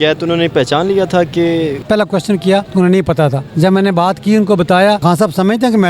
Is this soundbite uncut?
no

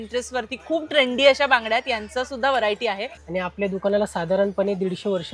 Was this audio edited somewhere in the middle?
yes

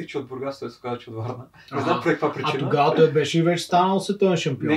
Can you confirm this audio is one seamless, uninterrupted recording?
yes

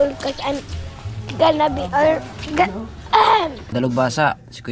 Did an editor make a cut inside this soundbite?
yes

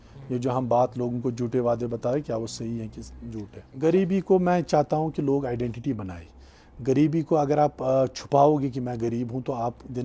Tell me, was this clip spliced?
yes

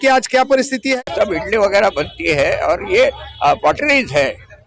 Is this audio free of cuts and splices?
no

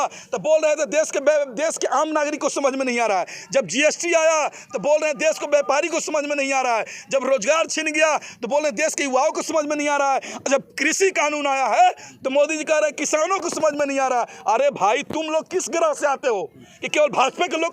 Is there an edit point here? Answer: no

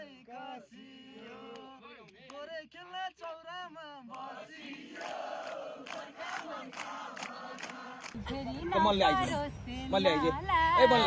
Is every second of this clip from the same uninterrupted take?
no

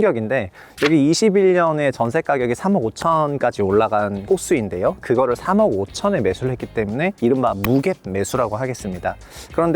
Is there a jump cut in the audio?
yes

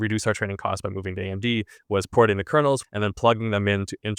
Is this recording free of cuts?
no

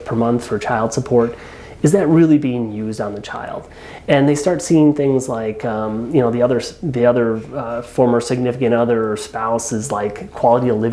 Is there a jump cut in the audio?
no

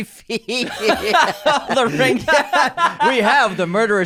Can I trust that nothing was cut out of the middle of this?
yes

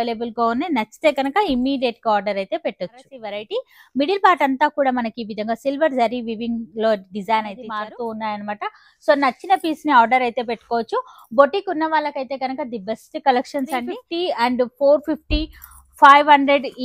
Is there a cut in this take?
yes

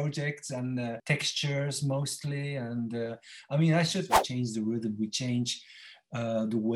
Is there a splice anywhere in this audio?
yes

